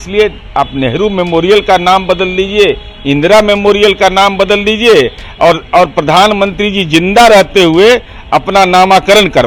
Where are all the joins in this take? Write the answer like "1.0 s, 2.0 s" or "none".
none